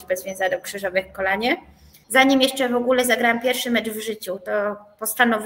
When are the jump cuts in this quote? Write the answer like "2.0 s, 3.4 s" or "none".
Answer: 1.9 s